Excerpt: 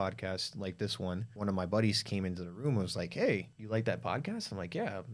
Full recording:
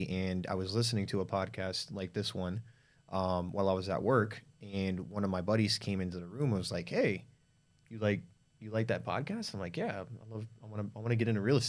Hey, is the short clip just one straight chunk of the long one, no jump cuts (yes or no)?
no